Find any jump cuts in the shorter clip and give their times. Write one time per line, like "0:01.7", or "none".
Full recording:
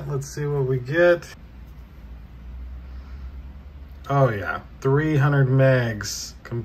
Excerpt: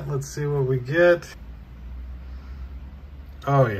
0:01.3